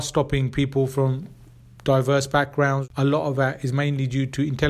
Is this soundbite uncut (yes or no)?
no